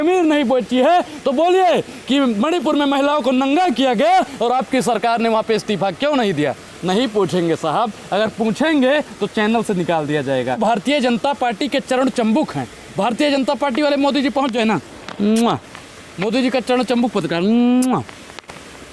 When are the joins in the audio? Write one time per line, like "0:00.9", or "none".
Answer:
0:10.6